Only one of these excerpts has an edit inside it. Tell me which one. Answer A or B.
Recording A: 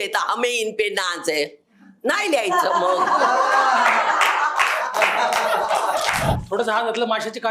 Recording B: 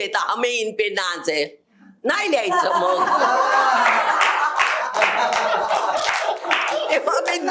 A